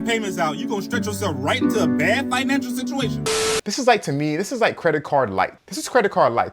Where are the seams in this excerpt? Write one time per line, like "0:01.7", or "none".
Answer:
0:03.5